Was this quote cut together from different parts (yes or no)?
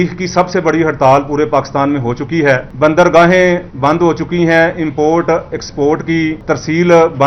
yes